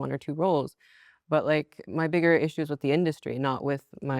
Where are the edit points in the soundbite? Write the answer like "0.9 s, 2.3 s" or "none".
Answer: 1.8 s